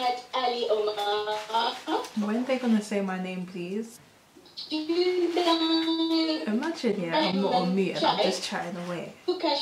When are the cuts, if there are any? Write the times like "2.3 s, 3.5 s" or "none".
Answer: none